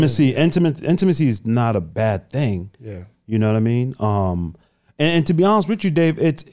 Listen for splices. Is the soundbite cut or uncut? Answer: uncut